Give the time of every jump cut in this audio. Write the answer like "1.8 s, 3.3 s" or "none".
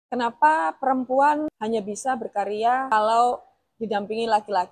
1.5 s, 2.9 s